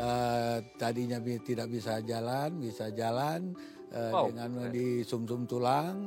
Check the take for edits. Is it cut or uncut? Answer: uncut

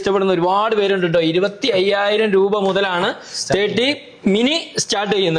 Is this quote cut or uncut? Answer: uncut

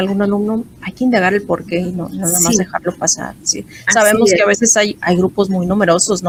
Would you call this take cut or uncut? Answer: uncut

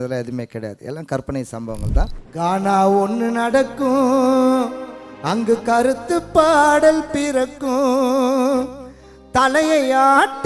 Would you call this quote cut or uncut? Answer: cut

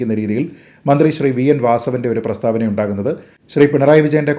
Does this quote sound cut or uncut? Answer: cut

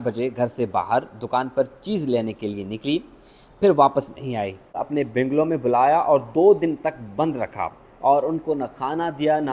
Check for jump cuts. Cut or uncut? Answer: cut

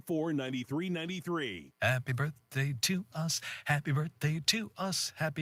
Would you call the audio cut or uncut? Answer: uncut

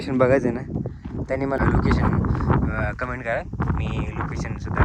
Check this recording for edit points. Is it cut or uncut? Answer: cut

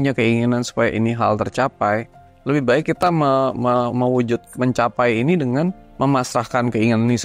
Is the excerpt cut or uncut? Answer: uncut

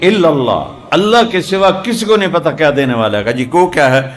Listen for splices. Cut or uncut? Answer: uncut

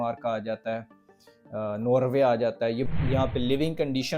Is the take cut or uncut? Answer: cut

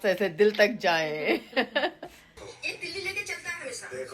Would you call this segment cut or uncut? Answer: uncut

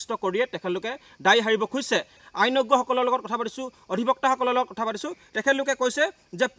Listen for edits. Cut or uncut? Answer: cut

